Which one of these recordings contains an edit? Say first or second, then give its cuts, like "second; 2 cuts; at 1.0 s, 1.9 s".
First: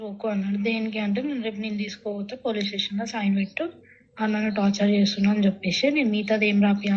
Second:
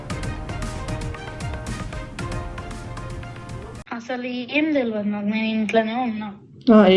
second; 1 cut; at 3.8 s